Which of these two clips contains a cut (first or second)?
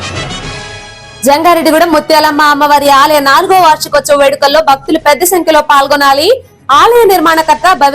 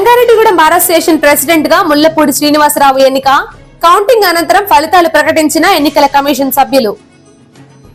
first